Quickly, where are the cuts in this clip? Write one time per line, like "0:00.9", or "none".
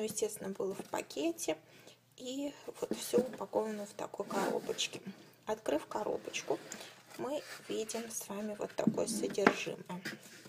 0:07.0